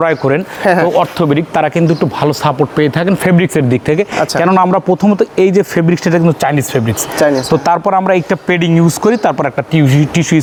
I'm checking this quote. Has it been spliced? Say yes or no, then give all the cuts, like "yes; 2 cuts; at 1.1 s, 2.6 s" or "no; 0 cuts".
no; 0 cuts